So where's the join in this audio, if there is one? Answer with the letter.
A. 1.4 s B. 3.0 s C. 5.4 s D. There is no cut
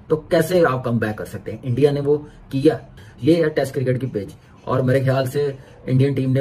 B